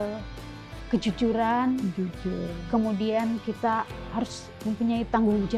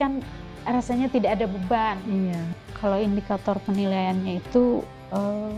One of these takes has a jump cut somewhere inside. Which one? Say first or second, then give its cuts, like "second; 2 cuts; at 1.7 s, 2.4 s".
second; 1 cut; at 2.5 s